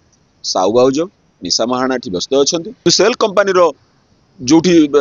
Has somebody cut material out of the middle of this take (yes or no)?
yes